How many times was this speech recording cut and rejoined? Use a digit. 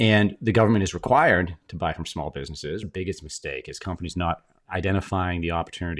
1